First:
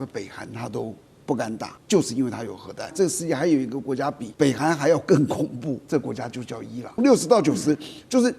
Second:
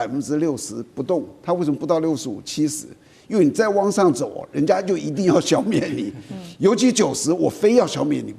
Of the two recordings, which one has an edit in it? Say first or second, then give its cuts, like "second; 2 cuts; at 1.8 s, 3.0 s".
first; 5 cuts; at 1.7 s, 2.9 s, 4.2 s, 5.8 s, 7.0 s